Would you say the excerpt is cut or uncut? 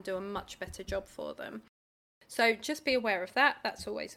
uncut